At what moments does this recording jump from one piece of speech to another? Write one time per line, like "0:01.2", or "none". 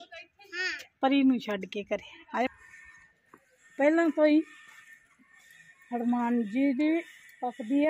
0:02.5